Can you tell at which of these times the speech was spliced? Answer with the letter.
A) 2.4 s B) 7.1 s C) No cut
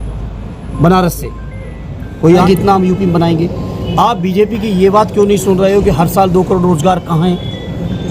A